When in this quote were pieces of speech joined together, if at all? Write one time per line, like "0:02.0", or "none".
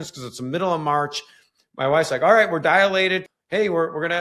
0:03.3

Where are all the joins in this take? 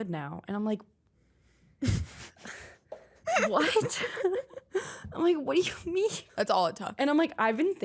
0:06.2

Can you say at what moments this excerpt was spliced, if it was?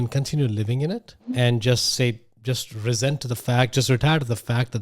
0:01.2

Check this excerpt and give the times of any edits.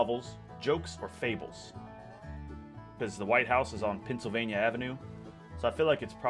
0:02.8

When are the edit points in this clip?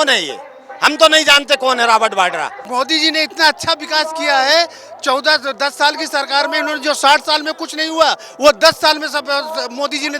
0:02.6

